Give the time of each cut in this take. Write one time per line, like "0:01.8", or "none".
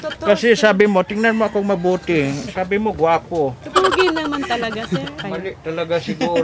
0:05.2

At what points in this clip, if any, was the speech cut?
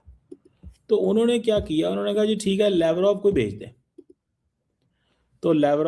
none

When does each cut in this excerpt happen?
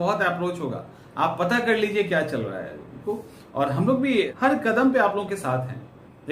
0:03.0
0:04.3

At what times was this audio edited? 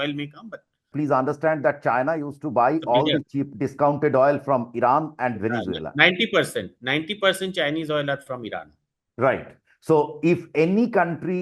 0:00.9

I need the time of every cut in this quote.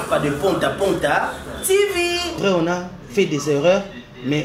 0:02.4

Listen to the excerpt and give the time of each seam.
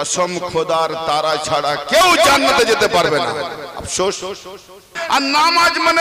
0:05.0

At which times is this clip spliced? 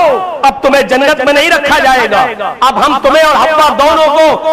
none

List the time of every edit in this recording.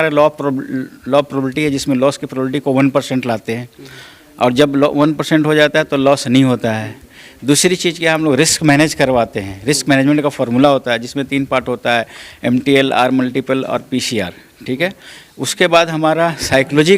none

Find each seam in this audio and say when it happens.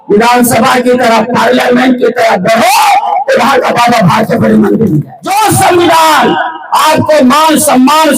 0:05.2

